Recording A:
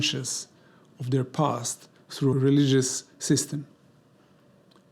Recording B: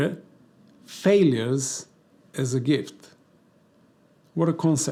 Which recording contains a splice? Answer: A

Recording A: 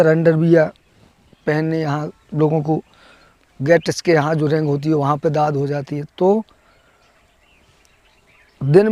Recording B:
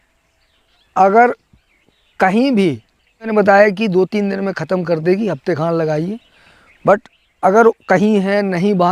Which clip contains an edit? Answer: B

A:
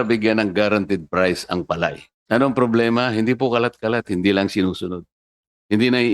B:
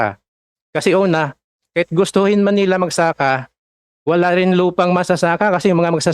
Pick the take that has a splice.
A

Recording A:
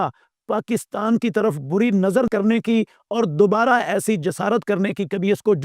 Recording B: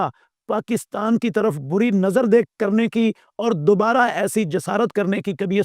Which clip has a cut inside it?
A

